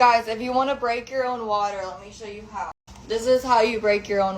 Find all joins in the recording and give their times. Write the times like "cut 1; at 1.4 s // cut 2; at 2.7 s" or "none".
cut 1; at 2.9 s